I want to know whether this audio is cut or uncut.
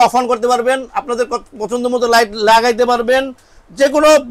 uncut